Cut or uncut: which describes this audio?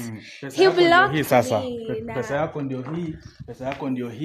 uncut